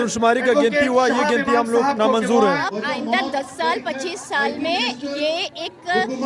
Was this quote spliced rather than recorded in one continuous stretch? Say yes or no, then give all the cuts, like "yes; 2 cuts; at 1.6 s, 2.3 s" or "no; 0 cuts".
yes; 1 cut; at 2.7 s